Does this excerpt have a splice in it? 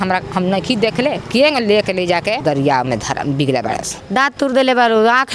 yes; 1 cut; at 3.9 s

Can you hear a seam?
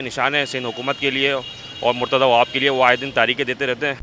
no; 0 cuts

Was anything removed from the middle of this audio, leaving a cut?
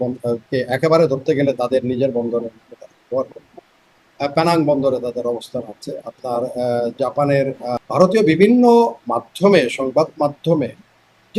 yes; 1 cut; at 7.7 s

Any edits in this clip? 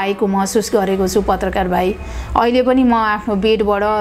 no; 0 cuts

